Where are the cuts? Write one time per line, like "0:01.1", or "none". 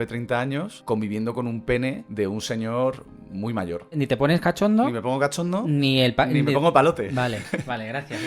0:03.9